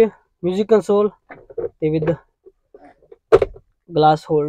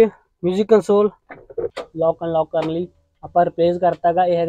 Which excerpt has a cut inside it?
second; 1 cut; at 1.7 s

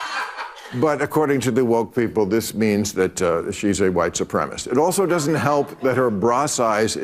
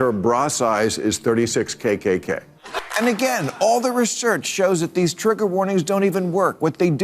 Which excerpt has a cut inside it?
second; 1 cut; at 2.6 s

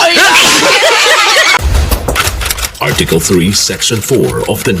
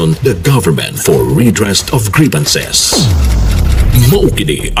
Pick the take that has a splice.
first; 1 cut; at 1.6 s

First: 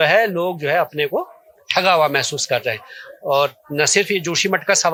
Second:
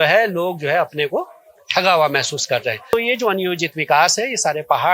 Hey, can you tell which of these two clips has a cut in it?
second; 1 cut; at 2.9 s

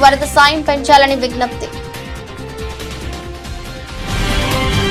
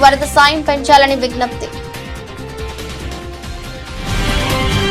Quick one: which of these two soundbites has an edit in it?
second; 1 cut; at 2.6 s

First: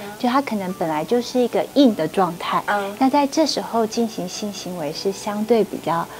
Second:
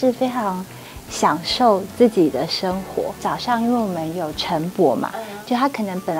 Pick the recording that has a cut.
second; 1 cut; at 3.2 s

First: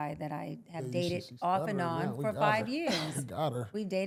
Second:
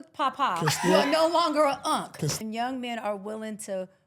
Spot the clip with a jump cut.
second; 1 cut; at 2.4 s

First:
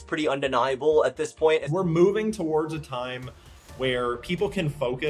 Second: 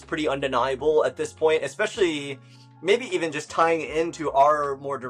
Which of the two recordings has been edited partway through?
first; 1 cut; at 1.7 s

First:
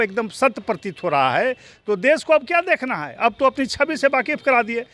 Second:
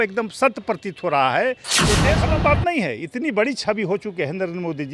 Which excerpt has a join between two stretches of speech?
second; 1 cut; at 2.1 s

